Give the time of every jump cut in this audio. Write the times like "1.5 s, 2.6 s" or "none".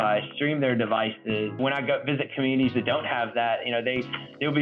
1.6 s